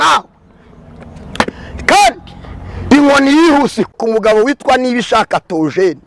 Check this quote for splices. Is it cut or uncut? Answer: cut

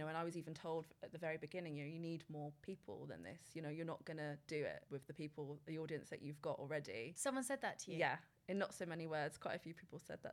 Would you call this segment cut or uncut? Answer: uncut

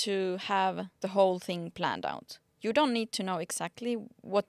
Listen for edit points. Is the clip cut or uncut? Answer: cut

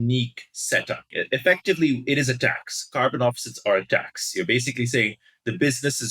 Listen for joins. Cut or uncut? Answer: cut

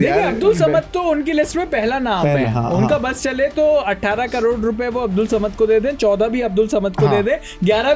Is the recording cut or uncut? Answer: uncut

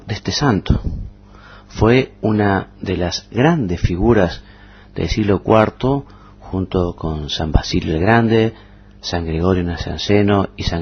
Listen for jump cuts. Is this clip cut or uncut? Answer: uncut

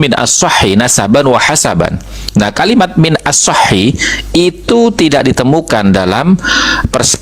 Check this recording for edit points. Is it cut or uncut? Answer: uncut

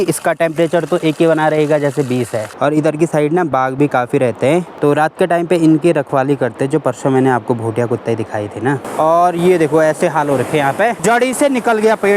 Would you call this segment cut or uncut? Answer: cut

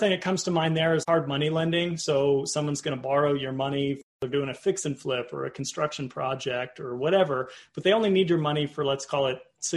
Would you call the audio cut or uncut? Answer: cut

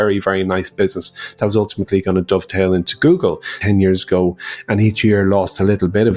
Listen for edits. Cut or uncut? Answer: cut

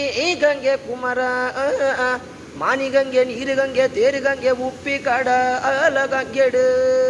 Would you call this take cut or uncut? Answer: uncut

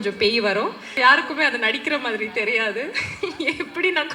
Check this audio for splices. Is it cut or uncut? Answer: cut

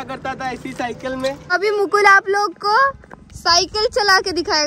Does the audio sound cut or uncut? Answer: cut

